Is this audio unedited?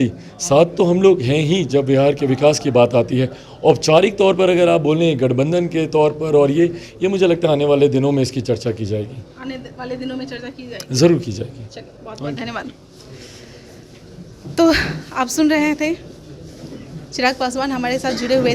yes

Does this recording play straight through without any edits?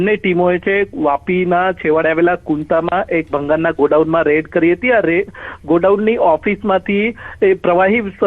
no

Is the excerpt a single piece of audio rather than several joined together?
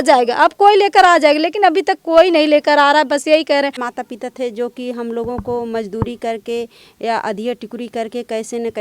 no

